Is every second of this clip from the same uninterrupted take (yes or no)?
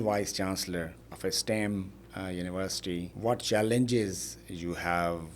no